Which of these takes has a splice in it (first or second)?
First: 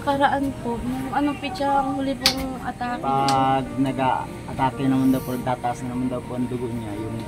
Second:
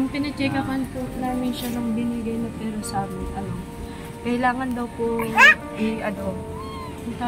first